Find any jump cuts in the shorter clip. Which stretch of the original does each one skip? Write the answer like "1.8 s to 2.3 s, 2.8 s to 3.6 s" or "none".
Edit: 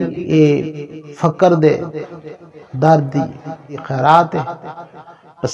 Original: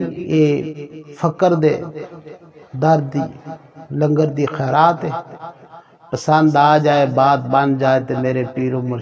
3.9 s to 4.6 s